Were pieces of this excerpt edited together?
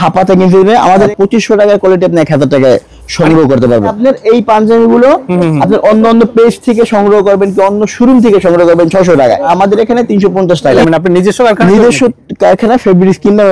yes; 4 cuts; at 1.1 s, 3.9 s, 9.5 s, 10.8 s

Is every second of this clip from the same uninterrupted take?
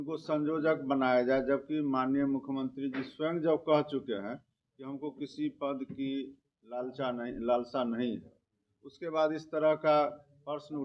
yes; 0 cuts

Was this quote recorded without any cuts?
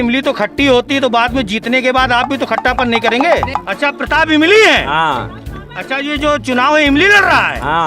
no; 1 cut; at 3.5 s

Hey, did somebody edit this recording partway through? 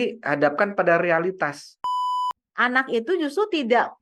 yes; 1 cut; at 2.1 s

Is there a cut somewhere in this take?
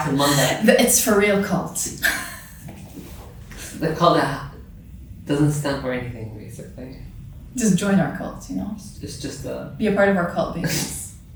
no; 0 cuts

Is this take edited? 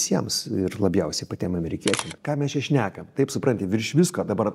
yes; 1 cut; at 2.1 s

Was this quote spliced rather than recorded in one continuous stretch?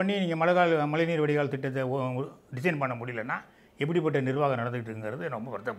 no; 0 cuts

